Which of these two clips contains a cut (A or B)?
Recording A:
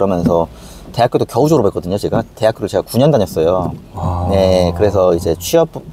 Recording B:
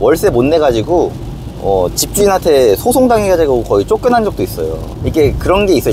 B